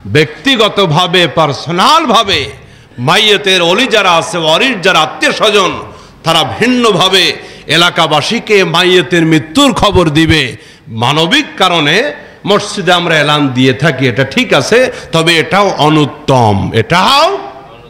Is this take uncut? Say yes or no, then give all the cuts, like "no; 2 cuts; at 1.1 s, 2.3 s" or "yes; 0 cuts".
yes; 0 cuts